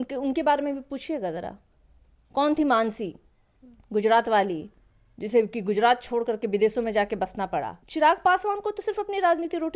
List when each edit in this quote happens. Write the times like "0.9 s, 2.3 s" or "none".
7.8 s